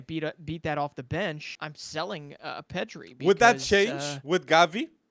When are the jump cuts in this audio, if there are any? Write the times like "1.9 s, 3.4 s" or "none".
1.5 s